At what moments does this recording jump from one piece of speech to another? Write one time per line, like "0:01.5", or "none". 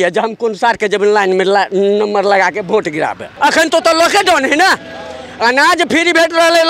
0:03.3